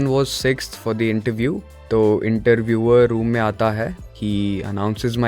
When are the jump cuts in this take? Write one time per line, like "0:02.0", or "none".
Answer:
0:01.7
0:04.0